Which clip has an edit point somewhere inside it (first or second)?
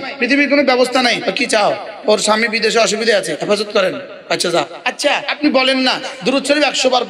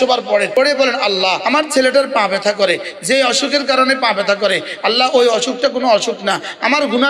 first